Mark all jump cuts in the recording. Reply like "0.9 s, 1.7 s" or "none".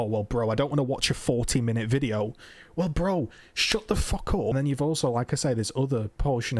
4.5 s